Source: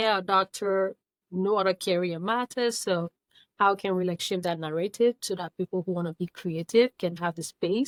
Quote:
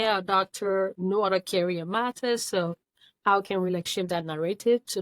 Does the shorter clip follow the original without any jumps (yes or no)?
no